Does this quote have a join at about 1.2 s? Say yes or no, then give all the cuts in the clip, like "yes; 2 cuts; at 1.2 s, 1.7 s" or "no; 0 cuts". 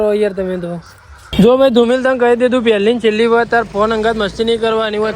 yes; 1 cut; at 1.2 s